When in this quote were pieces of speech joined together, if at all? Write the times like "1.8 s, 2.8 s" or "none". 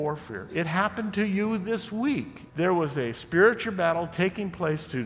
2.4 s

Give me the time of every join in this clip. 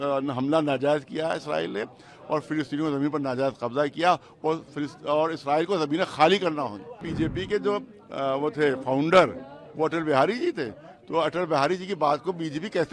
7.1 s

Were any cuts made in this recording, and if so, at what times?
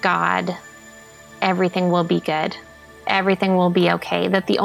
none

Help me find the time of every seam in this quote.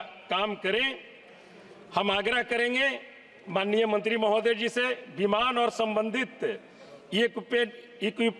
none

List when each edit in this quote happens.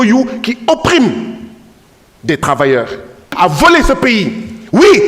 3.3 s

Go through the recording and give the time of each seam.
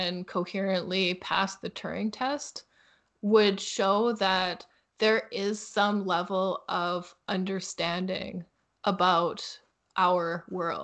none

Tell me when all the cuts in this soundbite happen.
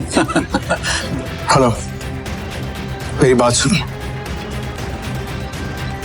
0.9 s, 4.8 s

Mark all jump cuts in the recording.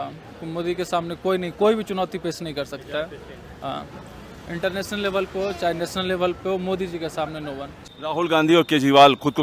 7.8 s

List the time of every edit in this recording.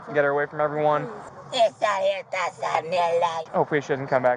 3.4 s

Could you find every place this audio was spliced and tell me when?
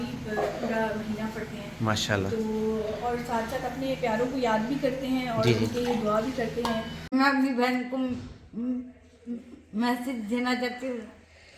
7.1 s

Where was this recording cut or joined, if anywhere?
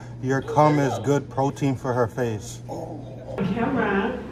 none

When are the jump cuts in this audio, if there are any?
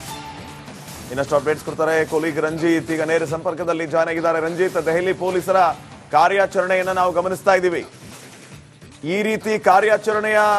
none

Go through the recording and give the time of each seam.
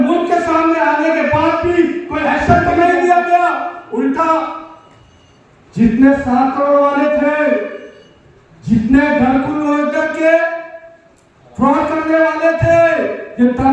2.4 s

